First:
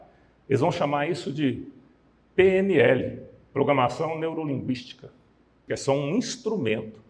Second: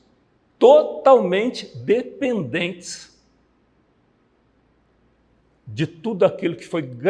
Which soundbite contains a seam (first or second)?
first